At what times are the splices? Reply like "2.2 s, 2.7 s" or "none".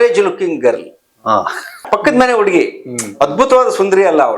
1.8 s